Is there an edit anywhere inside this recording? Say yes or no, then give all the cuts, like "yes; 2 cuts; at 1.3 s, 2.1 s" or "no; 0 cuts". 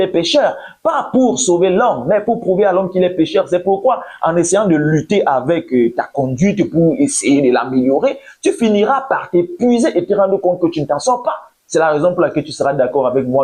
yes; 1 cut; at 11.0 s